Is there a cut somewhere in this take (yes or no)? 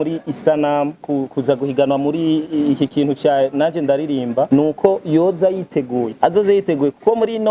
yes